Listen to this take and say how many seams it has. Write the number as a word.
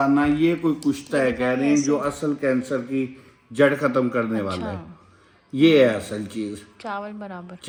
zero